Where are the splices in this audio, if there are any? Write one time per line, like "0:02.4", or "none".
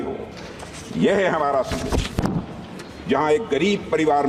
none